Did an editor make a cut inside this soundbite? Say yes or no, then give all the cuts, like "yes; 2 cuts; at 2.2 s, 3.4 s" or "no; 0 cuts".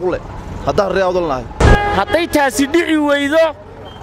yes; 1 cut; at 1.6 s